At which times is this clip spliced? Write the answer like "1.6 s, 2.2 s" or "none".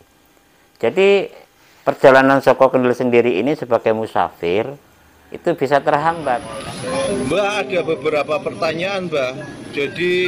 6.5 s